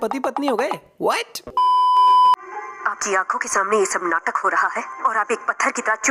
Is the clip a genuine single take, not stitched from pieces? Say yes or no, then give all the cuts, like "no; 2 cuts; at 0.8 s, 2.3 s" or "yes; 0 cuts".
yes; 0 cuts